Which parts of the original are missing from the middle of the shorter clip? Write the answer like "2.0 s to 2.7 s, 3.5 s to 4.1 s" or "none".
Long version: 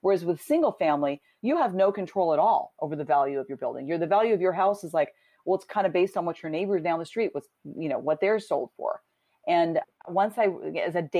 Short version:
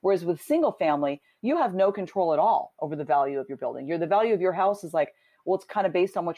none

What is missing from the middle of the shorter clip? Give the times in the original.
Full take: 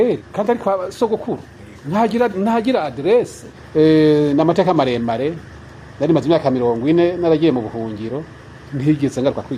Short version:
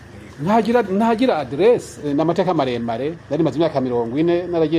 3.5 s to 4.3 s, 5.4 s to 5.9 s

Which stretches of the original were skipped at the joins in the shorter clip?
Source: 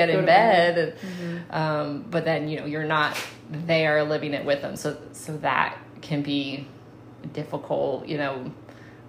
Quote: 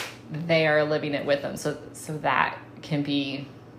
none

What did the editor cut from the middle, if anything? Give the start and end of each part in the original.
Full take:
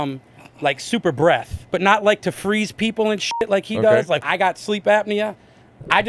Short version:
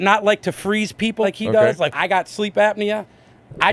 3.0 s to 3.5 s

